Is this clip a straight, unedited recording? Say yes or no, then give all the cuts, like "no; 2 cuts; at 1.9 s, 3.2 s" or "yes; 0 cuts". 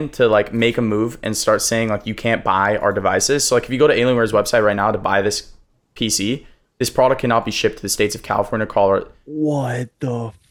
yes; 0 cuts